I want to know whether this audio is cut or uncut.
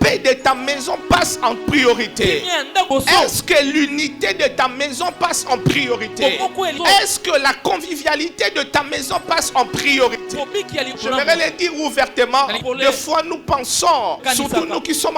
cut